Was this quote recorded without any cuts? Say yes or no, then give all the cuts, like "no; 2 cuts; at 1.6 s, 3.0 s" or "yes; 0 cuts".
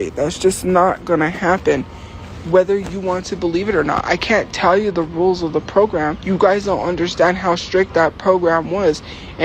no; 1 cut; at 6.2 s